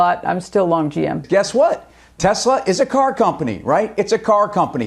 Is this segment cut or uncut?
cut